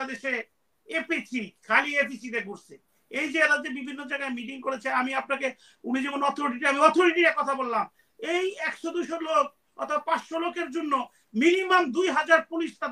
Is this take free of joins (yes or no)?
yes